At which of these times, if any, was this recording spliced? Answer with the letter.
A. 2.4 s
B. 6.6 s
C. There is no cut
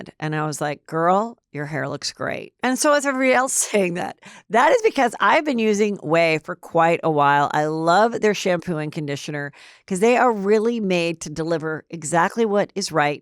C